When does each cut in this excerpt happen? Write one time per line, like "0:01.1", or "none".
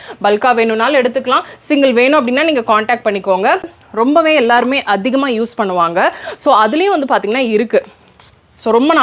0:03.7